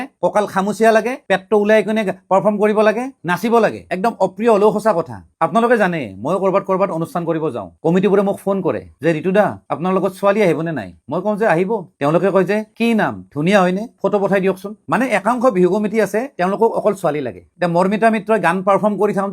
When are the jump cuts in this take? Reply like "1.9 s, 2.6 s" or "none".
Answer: 3.8 s, 5.3 s